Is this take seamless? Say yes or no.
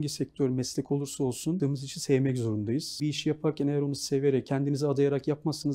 no